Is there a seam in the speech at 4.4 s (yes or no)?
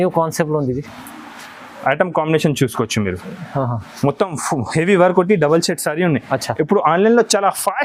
no